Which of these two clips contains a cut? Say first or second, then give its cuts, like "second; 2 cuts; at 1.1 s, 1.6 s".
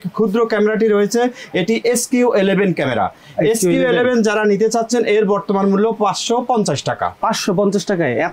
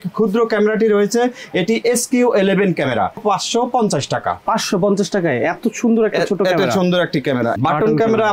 second; 2 cuts; at 3.2 s, 7.6 s